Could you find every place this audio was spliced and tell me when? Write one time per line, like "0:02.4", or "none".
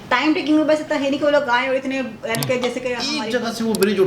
0:03.1